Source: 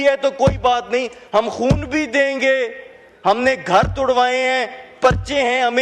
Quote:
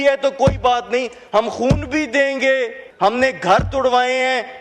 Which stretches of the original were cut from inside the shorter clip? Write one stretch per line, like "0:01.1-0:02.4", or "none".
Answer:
0:02.8-0:03.1

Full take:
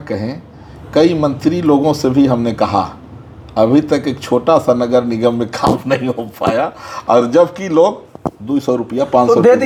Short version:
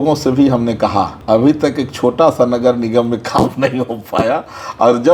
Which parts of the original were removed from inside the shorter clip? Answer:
0:02.9-0:03.4

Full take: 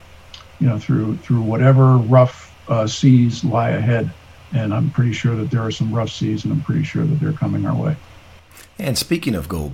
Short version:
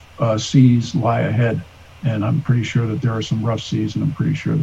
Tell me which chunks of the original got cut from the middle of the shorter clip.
none

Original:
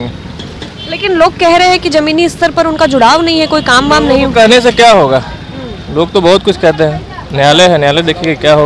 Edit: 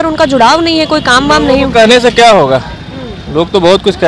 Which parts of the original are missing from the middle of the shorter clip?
none

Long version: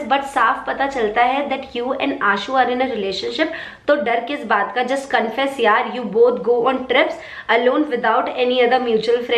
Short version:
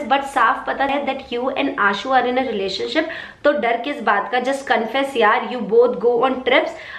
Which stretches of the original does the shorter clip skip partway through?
0:00.9-0:01.3

